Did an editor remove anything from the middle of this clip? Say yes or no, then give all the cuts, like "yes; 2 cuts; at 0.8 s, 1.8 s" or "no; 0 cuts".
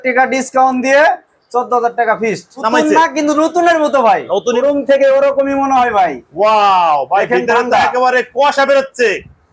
yes; 2 cuts; at 2.6 s, 4.6 s